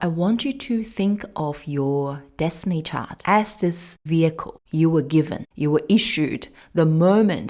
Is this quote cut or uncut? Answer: cut